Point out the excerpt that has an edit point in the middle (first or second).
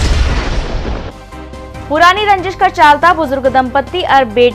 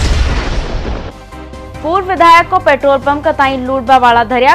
first